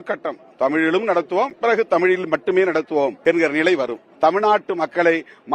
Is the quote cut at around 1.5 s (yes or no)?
no